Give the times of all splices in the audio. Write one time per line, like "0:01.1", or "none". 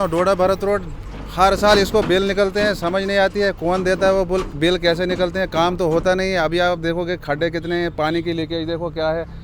none